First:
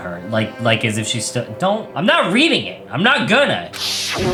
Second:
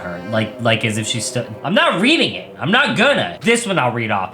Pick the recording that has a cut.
second; 2 cuts; at 1.5 s, 3.3 s

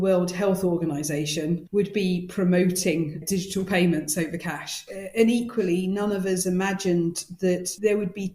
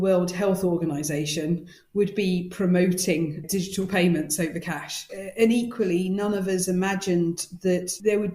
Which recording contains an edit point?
first; 1 cut; at 1.6 s

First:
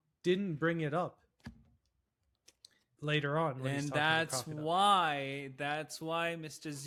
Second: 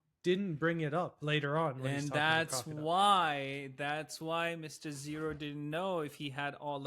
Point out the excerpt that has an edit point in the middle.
second; 1 cut; at 1.2 s

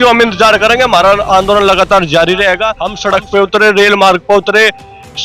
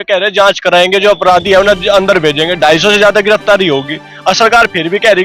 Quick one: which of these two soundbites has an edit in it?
first; 1 cut; at 2.9 s

